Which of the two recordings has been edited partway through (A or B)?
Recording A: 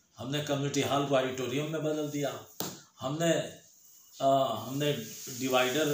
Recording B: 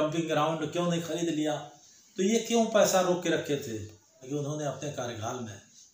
B